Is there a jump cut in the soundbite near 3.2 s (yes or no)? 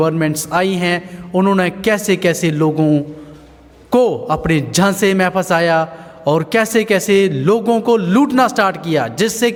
no